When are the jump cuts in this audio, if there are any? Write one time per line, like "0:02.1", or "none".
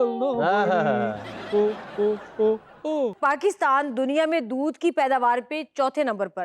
0:03.2